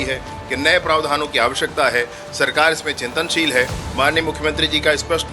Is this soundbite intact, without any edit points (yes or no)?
yes